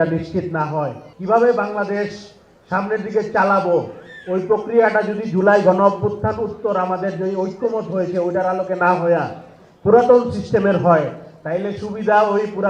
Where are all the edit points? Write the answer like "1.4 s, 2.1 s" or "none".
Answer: 1.1 s